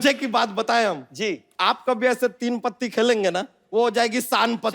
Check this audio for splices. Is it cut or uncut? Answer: cut